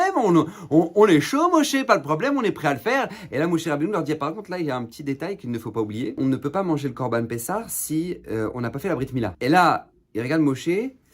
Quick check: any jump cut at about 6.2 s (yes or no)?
yes